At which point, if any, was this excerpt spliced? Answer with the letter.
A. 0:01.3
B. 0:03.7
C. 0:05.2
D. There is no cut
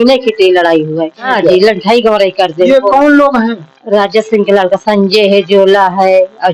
A